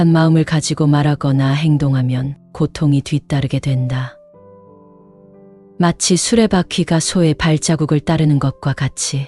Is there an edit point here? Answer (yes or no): no